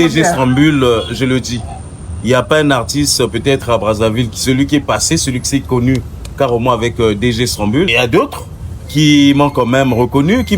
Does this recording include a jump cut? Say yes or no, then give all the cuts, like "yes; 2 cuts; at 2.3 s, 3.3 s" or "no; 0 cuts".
yes; 1 cut; at 7.9 s